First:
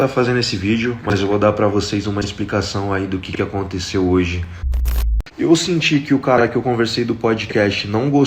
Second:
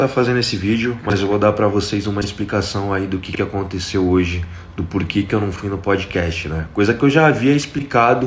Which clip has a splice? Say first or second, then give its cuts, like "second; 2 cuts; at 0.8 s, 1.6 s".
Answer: first; 1 cut; at 4.9 s